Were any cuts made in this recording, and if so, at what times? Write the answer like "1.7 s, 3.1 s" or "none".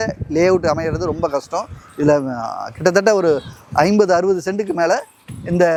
none